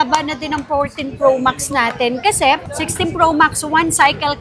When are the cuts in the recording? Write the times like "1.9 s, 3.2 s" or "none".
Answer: 2.6 s